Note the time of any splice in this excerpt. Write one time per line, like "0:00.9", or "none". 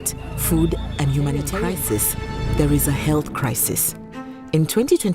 0:01.5